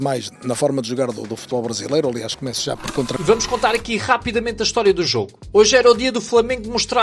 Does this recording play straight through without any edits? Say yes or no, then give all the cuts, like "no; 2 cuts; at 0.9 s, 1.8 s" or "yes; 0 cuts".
no; 1 cut; at 3.1 s